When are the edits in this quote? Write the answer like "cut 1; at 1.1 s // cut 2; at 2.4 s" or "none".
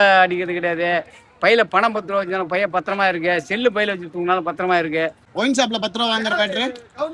cut 1; at 5.2 s